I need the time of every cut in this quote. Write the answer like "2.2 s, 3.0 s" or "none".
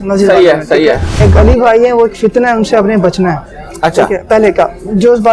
1.1 s